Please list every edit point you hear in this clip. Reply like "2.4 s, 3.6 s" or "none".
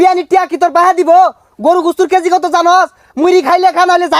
none